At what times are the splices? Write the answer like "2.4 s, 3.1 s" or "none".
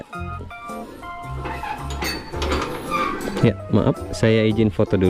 none